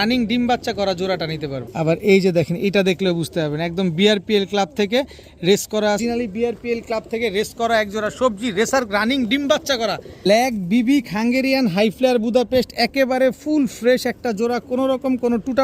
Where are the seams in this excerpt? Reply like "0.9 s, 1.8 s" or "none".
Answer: 1.6 s, 6.0 s, 10.2 s